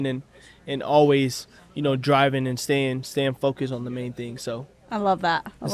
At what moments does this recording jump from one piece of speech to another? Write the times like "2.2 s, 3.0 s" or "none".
none